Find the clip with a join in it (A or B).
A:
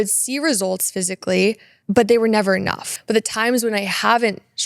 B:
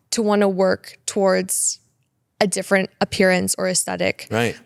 A